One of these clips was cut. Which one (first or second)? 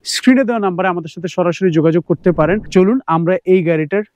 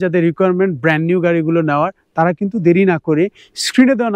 first